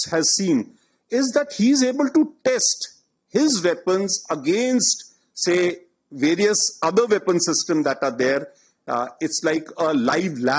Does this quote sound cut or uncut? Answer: uncut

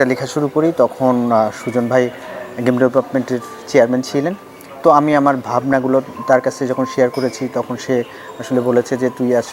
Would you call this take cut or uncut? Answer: uncut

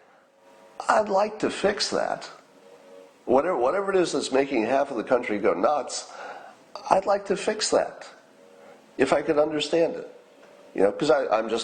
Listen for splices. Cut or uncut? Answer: uncut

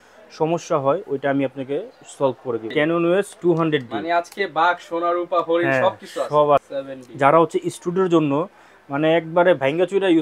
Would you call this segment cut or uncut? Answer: cut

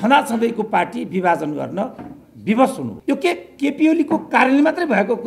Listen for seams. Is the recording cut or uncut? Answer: cut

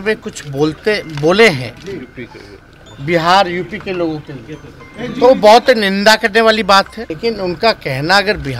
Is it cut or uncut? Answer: cut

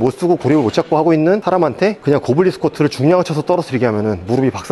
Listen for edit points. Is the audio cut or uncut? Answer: uncut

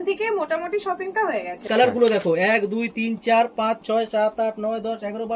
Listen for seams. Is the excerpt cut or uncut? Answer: cut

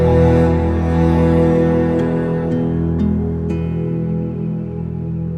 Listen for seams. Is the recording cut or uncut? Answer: uncut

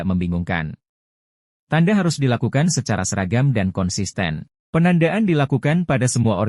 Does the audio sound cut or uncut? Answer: cut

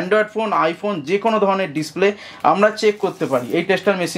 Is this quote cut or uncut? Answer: uncut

